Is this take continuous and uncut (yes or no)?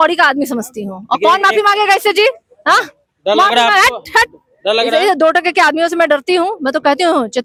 yes